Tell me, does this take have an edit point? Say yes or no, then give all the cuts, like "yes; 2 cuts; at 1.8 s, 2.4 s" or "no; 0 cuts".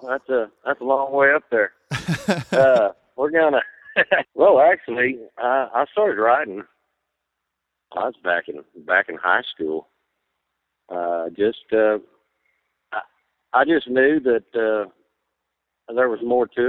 yes; 1 cut; at 4.3 s